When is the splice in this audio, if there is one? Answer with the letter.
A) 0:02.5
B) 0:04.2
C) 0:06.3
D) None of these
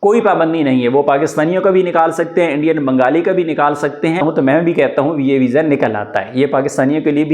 B